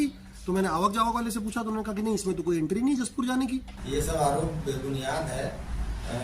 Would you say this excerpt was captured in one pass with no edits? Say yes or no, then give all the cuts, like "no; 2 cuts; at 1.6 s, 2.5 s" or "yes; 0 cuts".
no; 1 cut; at 3.8 s